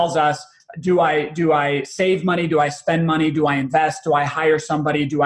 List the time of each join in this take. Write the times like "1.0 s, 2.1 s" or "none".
none